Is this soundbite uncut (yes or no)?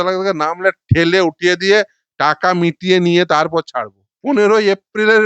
no